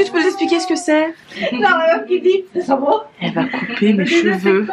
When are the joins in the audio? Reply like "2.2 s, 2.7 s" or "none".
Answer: 1.3 s